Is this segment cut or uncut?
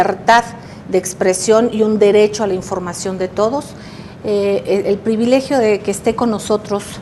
cut